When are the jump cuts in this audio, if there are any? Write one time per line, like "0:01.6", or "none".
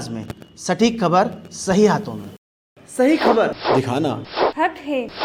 none